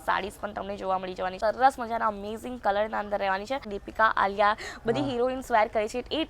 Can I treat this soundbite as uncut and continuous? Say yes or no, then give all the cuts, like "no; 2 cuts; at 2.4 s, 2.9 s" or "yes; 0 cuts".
no; 2 cuts; at 1.4 s, 3.7 s